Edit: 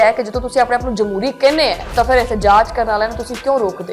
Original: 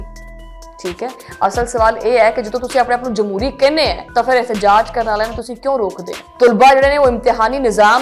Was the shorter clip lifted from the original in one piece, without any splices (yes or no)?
yes